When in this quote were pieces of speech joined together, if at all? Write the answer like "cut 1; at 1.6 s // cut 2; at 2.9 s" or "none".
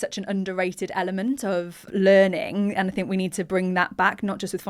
cut 1; at 1.8 s

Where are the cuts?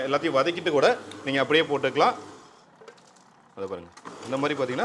none

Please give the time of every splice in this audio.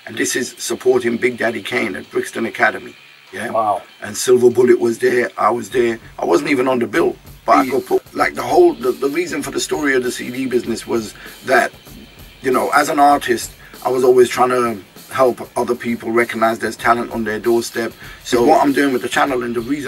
cut 1; at 8.0 s // cut 2; at 18.5 s

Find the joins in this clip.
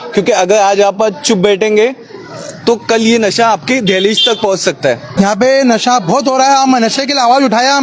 cut 1; at 5.1 s

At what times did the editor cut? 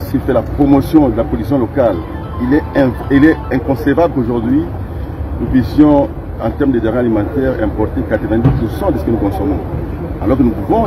none

